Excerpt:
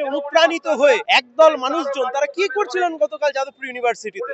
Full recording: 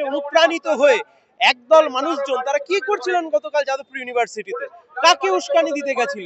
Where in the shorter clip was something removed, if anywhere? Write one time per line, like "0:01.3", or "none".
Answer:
0:01.1